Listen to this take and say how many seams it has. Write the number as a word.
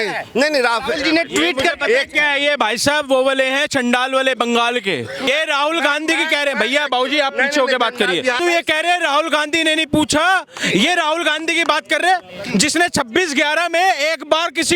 two